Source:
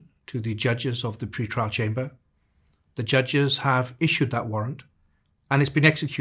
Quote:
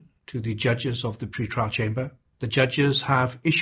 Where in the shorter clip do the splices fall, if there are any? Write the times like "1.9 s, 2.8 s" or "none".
2.2 s